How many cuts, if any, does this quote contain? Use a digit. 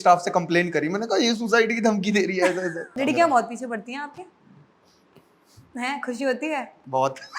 1